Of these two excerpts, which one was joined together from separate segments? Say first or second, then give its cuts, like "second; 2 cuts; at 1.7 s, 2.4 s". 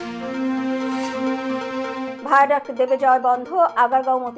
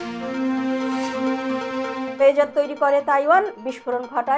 second; 1 cut; at 2.1 s